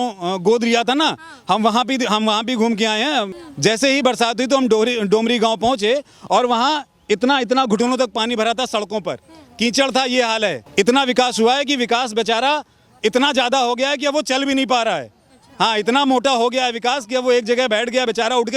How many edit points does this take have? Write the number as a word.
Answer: two